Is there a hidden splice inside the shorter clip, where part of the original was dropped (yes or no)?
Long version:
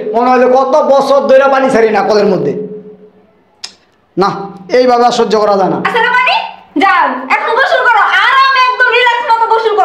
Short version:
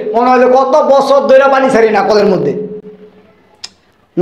no